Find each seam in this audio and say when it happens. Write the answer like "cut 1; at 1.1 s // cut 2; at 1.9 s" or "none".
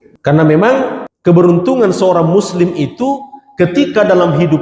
cut 1; at 1.1 s